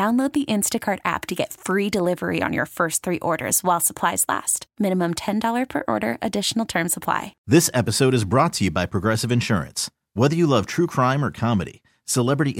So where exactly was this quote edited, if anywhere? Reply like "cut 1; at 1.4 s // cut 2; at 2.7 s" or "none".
cut 1; at 7.3 s